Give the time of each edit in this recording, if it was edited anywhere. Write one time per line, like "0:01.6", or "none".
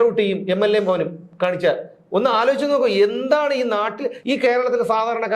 0:04.1